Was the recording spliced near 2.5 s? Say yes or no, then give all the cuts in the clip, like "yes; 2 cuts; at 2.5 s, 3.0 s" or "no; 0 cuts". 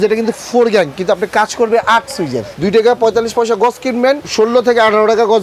yes; 1 cut; at 2.5 s